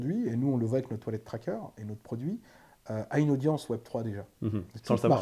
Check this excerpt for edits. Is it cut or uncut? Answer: uncut